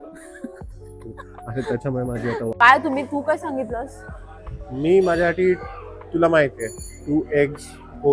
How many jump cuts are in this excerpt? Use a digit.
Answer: 1